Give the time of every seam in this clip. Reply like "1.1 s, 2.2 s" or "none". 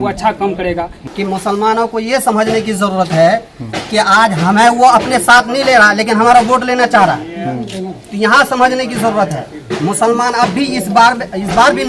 1.0 s

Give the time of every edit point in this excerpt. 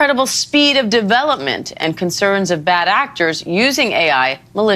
none

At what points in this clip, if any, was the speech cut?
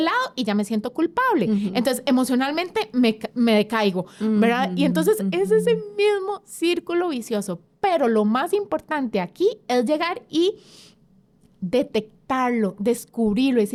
none

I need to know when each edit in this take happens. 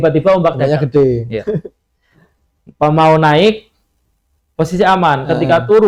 none

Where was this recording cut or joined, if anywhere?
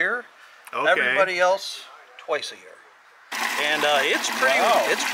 3.3 s

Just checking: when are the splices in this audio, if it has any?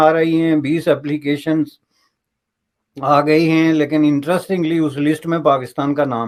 none

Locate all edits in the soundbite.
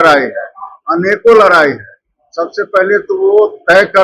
none

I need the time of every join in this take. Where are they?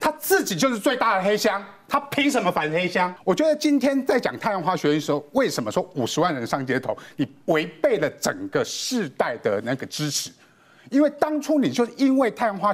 3.2 s

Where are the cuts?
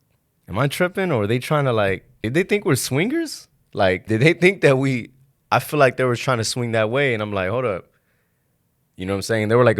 2.1 s, 4.0 s

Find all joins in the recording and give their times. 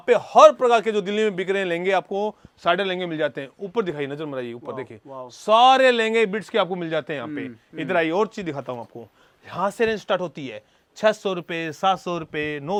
none

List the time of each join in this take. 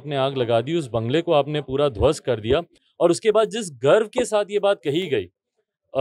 none

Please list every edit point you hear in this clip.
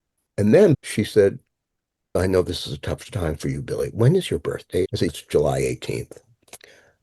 0.7 s, 2.2 s, 5.0 s

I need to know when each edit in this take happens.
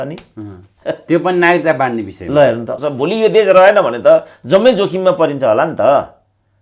2.7 s

